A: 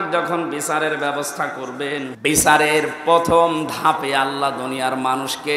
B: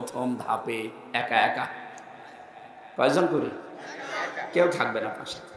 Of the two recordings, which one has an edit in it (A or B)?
A